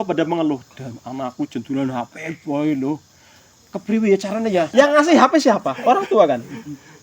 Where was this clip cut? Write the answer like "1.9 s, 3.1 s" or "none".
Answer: 4.7 s